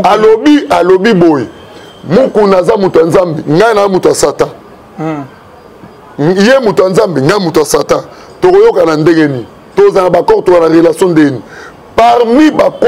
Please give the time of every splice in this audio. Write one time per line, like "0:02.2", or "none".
none